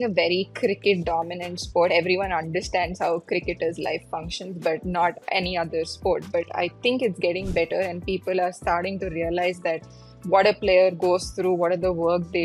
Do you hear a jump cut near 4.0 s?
no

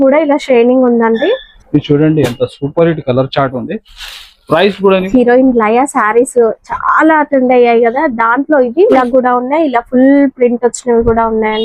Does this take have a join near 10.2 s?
no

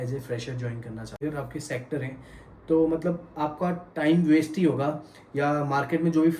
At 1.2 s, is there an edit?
yes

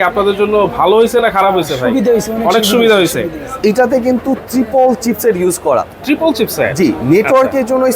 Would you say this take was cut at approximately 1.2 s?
no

